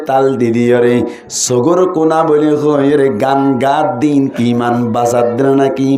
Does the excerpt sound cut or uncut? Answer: uncut